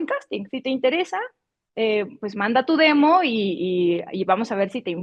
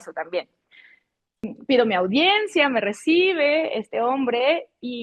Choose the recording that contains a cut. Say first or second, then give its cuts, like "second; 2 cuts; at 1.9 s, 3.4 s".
second; 1 cut; at 1.5 s